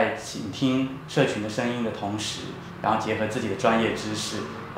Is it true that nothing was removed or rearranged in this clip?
yes; 0 cuts

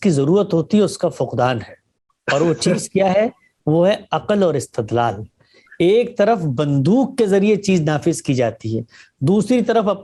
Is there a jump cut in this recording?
no; 0 cuts

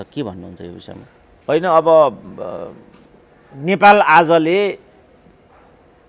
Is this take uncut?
yes; 0 cuts

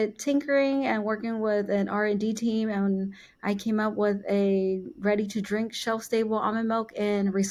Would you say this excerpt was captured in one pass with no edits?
yes; 0 cuts

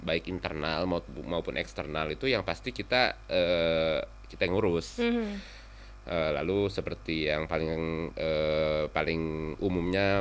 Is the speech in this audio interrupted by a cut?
no; 0 cuts

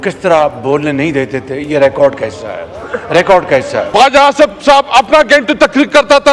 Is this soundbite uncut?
no; 1 cut; at 3.8 s

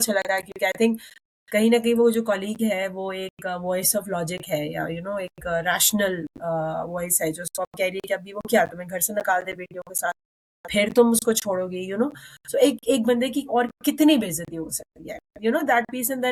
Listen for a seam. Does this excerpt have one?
no; 0 cuts

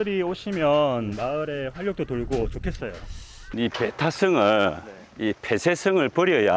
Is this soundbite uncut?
yes; 0 cuts

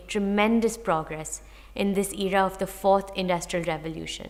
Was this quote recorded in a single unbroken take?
yes; 0 cuts

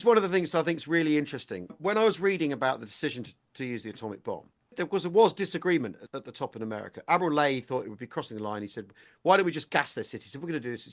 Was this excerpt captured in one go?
no; 3 cuts; at 1.7 s, 4.7 s, 6.1 s

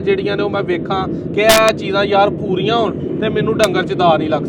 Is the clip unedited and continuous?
yes; 0 cuts

